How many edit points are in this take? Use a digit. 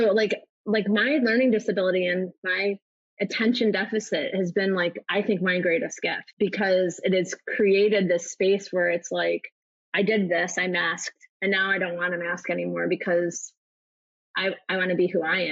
1